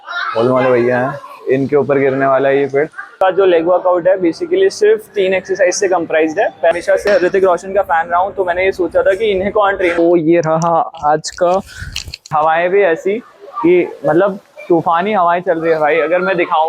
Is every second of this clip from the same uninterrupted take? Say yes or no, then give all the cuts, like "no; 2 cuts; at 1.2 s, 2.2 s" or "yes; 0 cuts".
no; 4 cuts; at 3.1 s, 6.7 s, 10.0 s, 12.3 s